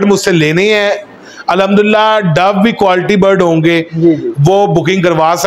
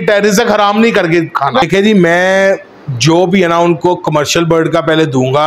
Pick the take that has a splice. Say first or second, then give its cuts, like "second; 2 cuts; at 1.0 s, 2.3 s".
second; 1 cut; at 1.6 s